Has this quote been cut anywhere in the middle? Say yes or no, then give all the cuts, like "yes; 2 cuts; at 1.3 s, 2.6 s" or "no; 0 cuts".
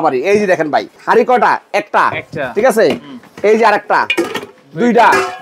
no; 0 cuts